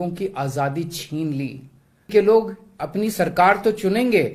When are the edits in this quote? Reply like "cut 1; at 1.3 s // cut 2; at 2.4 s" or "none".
cut 1; at 2.1 s